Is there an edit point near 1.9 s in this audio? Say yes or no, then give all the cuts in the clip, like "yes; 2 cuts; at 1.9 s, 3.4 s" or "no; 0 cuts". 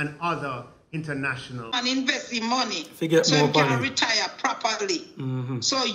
yes; 1 cut; at 1.9 s